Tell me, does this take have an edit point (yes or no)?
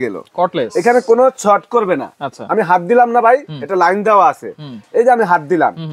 no